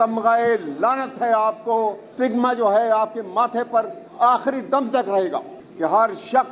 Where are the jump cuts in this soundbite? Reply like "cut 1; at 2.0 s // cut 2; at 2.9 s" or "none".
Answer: cut 1; at 2.1 s // cut 2; at 5.6 s